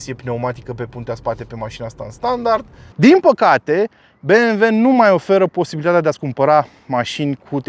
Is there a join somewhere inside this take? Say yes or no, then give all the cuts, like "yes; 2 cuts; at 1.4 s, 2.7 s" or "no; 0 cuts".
yes; 1 cut; at 2.8 s